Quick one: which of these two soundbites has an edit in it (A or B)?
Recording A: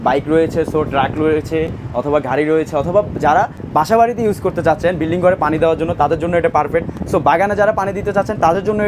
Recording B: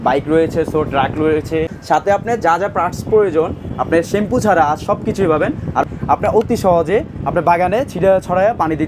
B